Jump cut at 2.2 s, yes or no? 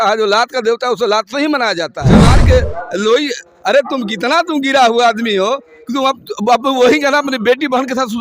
yes